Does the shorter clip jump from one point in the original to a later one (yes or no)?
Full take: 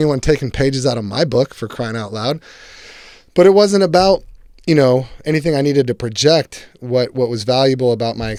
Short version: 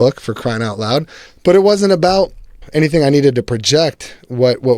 yes